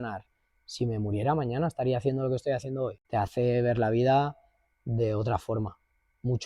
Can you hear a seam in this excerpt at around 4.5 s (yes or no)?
no